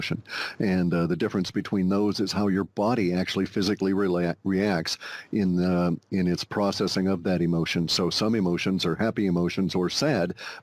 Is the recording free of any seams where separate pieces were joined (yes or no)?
no